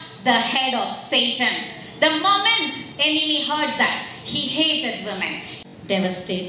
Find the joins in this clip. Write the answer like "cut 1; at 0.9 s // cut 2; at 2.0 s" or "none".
cut 1; at 5.5 s